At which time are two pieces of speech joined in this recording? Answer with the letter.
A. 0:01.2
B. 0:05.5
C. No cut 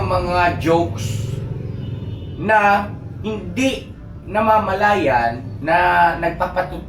B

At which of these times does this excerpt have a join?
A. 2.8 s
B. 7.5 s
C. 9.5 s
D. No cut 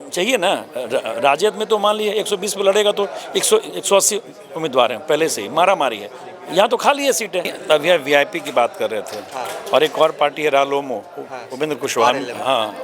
B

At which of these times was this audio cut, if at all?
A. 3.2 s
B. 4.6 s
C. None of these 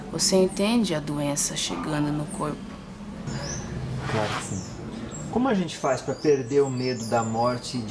A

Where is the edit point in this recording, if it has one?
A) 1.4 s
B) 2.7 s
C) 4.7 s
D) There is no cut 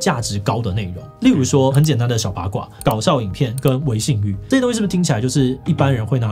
B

